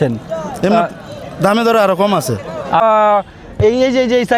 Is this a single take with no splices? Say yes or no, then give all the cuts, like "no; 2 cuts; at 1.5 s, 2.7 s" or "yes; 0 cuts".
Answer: no; 1 cut; at 2.8 s